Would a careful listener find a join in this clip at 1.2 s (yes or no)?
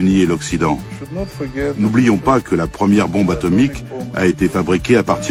no